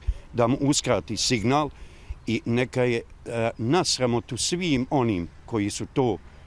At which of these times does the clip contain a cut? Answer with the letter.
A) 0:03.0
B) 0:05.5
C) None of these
C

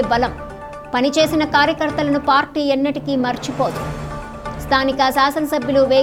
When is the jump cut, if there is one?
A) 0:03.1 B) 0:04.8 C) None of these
C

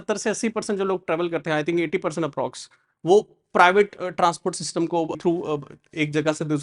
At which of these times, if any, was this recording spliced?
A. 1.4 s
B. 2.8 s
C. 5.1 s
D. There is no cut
C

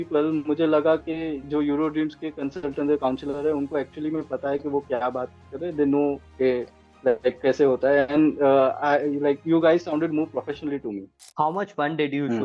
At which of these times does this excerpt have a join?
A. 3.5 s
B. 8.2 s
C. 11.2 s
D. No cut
C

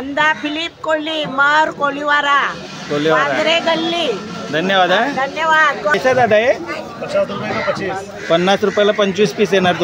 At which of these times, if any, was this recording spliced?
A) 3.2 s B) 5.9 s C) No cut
B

